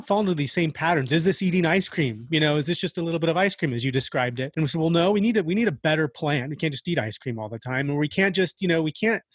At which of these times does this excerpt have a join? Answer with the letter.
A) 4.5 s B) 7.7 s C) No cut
A